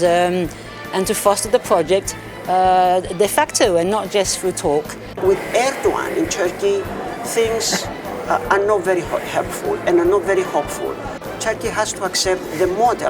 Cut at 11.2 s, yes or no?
yes